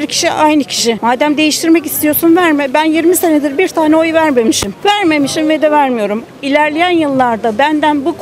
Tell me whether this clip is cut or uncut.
uncut